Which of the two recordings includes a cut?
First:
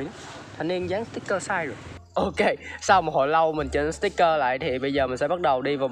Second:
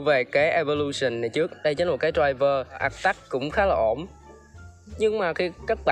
second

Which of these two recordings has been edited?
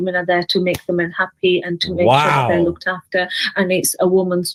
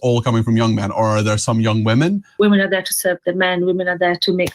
second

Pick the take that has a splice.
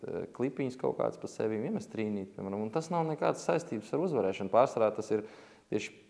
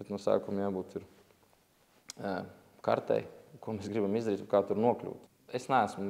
second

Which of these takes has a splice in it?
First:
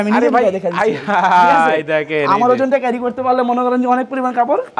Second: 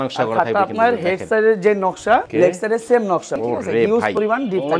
second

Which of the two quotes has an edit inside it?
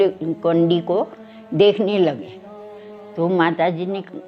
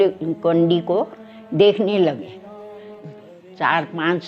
second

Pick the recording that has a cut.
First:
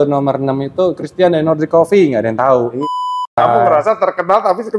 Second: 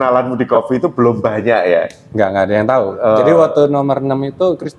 first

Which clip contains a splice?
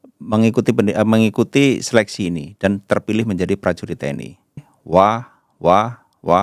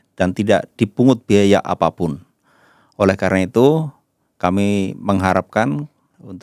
first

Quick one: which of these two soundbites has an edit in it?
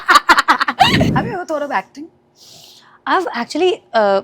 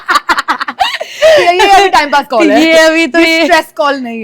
first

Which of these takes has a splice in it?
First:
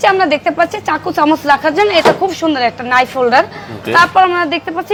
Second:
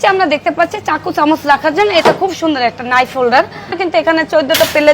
second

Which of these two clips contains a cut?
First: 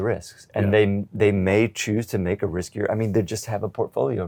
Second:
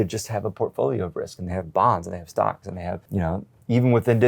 second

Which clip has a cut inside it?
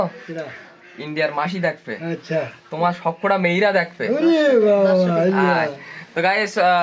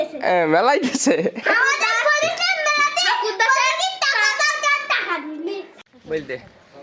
second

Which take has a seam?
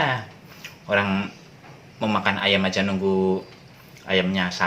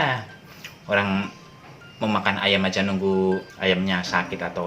second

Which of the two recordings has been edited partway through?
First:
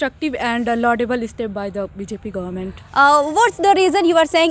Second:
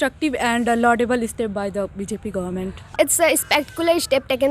second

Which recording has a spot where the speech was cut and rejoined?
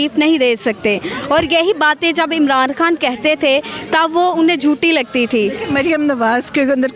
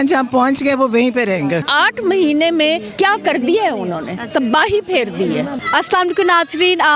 second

